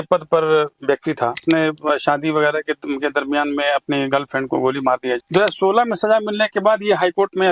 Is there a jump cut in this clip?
yes; 2 cuts; at 1.4 s, 5.2 s

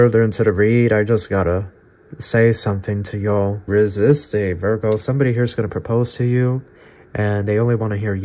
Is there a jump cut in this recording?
yes; 1 cut; at 3.6 s

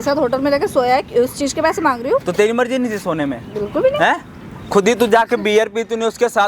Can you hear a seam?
no; 0 cuts

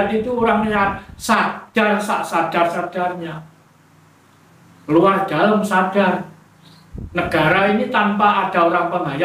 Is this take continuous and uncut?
yes; 0 cuts

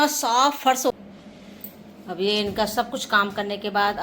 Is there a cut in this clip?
yes; 1 cut; at 1.0 s

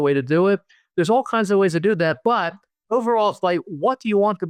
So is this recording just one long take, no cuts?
yes; 0 cuts

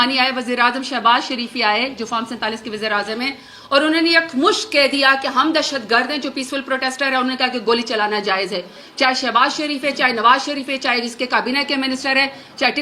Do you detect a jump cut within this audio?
yes; 1 cut; at 8.8 s

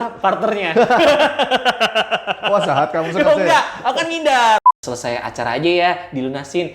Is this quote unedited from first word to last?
no; 1 cut; at 4.6 s

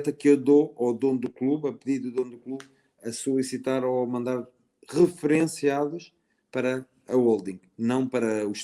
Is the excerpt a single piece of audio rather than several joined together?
yes; 0 cuts

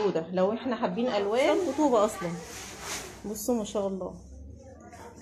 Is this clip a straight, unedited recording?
no; 1 cut; at 1.6 s

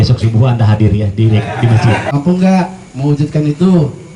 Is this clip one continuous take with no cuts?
no; 1 cut; at 2.1 s

